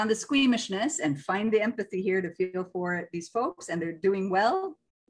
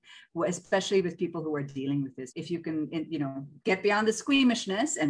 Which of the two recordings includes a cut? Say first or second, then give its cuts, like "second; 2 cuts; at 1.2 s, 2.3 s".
second; 1 cut; at 2.3 s